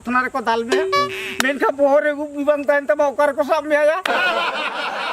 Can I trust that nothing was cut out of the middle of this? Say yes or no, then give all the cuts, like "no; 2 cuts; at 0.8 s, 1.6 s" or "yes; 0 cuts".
no; 1 cut; at 4.0 s